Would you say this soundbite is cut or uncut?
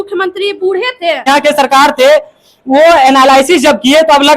cut